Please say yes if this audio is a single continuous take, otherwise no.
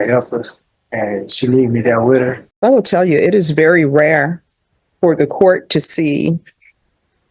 no